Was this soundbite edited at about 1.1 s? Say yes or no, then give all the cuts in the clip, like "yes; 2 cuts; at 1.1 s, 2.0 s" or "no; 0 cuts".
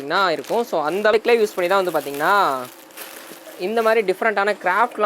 yes; 1 cut; at 1.1 s